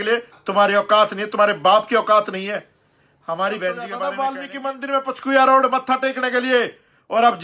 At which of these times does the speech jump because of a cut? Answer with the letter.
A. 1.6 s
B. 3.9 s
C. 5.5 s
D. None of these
B